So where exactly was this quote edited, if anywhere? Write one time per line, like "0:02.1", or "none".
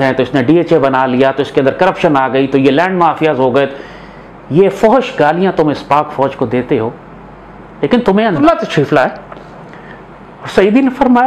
0:08.4